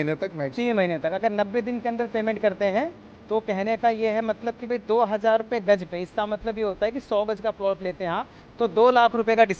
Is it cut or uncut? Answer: uncut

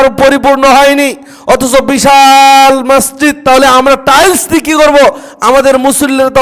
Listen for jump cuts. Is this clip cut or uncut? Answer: cut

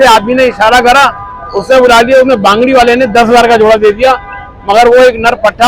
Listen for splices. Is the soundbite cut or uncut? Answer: uncut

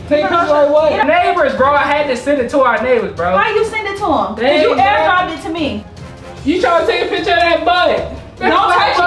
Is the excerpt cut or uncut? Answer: cut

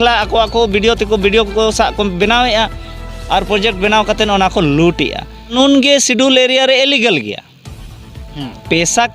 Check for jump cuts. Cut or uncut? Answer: cut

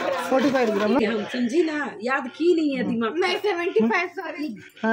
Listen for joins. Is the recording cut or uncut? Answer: cut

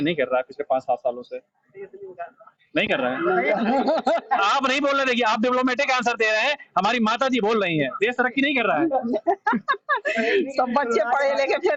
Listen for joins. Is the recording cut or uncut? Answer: uncut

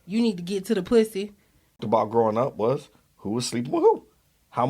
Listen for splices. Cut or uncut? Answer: cut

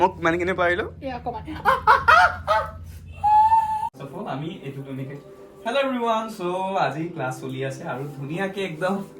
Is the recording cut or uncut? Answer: cut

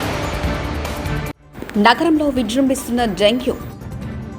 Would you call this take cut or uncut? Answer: cut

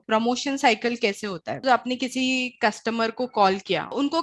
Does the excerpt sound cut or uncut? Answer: cut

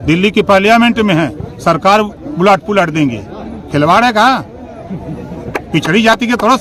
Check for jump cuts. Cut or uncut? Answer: uncut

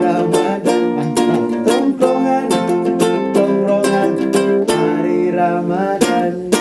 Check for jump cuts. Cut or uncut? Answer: uncut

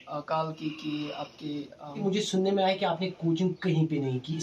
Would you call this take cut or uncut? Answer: cut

